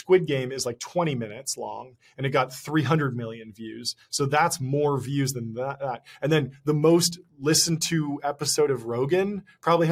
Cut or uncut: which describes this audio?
uncut